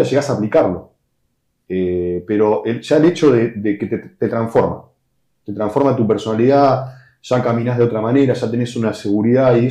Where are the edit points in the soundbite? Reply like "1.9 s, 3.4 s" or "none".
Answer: none